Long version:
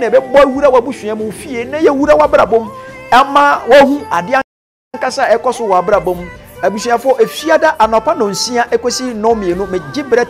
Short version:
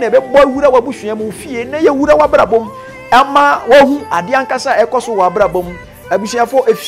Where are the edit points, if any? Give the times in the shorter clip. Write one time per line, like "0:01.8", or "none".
0:04.5